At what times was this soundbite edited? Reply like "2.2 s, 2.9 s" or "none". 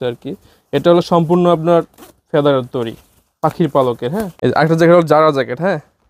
4.3 s